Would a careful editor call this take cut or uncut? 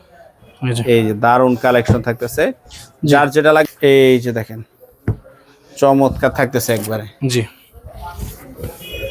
cut